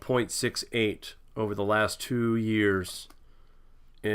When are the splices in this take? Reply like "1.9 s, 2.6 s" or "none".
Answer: 1.1 s

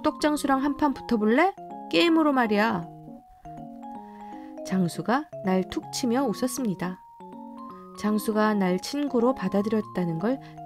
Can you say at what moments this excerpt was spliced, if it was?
2.8 s, 4.7 s

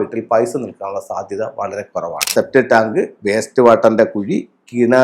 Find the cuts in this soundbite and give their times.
2.2 s

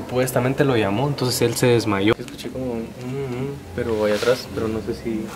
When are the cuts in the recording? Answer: 2.1 s

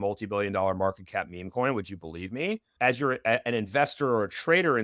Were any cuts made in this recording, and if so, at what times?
2.7 s

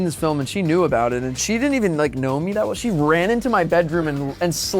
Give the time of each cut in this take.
1.3 s

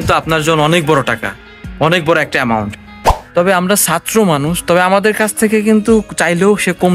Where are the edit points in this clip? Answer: 3.1 s

